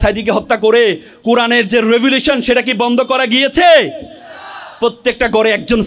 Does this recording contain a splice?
no; 0 cuts

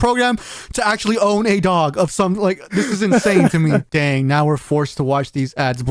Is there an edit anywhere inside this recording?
yes; 1 cut; at 3.9 s

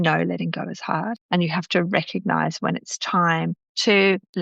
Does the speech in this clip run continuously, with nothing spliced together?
no; 1 cut; at 1.2 s

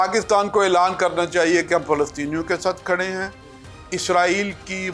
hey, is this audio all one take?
yes; 0 cuts

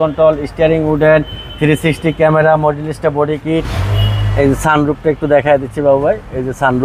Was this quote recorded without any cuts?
no; 1 cut; at 3.8 s

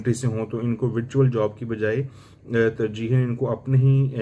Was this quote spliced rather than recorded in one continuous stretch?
no; 0 cuts

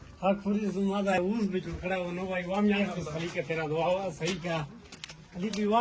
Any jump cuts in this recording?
yes; 1 cut; at 1.1 s

